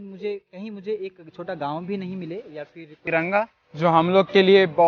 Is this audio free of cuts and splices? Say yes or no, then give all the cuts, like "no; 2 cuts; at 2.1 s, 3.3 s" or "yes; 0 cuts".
no; 1 cut; at 3.0 s